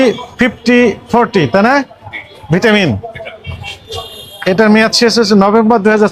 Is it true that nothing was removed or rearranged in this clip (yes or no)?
yes